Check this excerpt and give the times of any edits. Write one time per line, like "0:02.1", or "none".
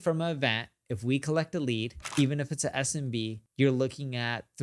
0:02.0
0:03.4